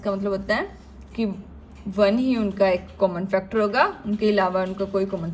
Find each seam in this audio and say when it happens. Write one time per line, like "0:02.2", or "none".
none